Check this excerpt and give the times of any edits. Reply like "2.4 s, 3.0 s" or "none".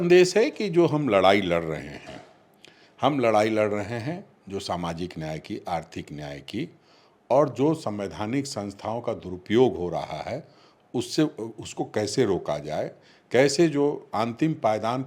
none